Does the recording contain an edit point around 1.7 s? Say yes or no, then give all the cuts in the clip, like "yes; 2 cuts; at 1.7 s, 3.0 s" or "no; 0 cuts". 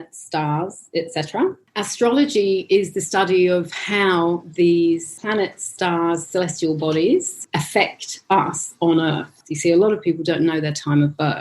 yes; 4 cuts; at 1.7 s, 5.1 s, 7.3 s, 9.4 s